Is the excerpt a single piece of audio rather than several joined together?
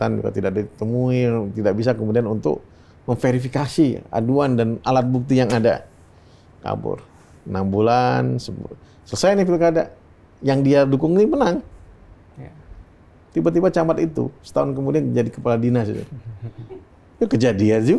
yes; 0 cuts

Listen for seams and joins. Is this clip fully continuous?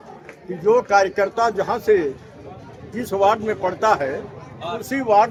yes; 0 cuts

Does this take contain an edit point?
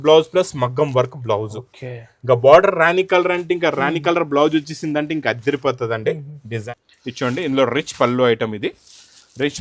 yes; 1 cut; at 6.6 s

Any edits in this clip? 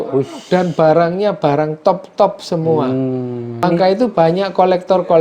yes; 1 cut; at 3.5 s

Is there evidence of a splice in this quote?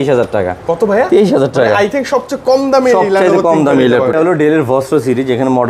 yes; 1 cut; at 4.1 s

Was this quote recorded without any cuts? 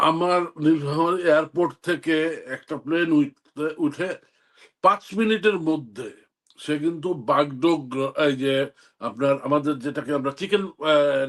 yes; 0 cuts

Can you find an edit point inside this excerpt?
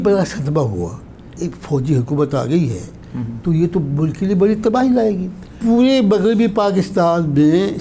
yes; 2 cuts; at 1.3 s, 5.6 s

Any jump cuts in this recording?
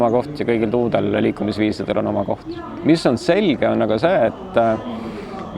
no; 0 cuts

